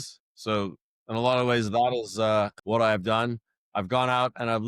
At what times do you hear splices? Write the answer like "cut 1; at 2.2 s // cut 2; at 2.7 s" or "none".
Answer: cut 1; at 2.6 s